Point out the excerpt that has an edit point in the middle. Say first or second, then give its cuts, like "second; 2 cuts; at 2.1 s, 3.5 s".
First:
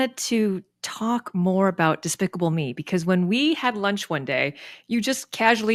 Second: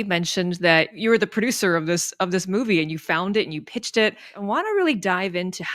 second; 2 cuts; at 1.0 s, 4.3 s